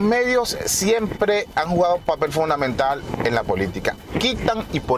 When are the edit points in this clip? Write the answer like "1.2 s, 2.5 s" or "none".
1.5 s